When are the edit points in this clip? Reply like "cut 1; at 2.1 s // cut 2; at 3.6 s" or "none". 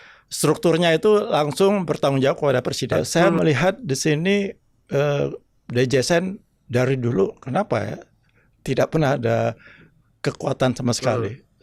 cut 1; at 2.9 s